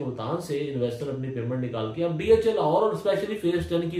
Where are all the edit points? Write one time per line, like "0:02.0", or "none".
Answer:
none